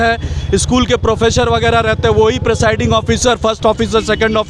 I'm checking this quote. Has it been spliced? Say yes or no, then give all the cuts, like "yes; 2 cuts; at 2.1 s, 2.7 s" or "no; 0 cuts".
no; 0 cuts